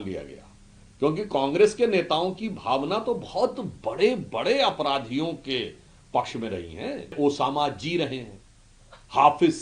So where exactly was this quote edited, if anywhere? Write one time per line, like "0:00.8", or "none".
0:07.1

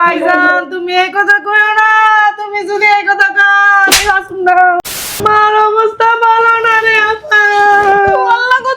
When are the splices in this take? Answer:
0:05.1

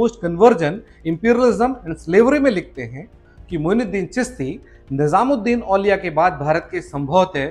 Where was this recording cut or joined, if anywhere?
none

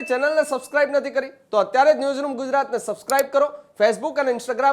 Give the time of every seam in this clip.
none

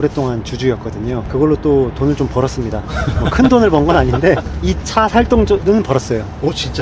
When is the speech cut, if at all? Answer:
0:01.2
0:04.6
0:05.6

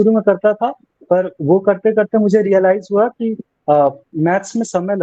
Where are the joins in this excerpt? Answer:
none

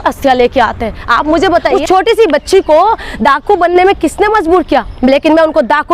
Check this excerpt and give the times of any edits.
0:01.7

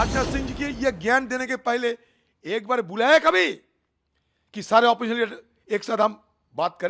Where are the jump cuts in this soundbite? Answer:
none

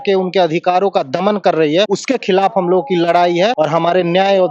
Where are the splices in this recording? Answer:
0:02.0
0:03.5

